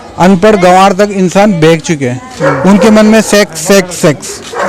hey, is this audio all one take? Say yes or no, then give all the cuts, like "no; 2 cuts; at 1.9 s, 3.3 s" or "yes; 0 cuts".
yes; 0 cuts